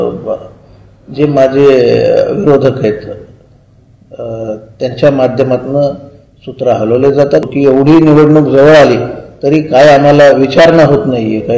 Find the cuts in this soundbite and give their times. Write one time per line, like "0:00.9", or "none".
0:07.4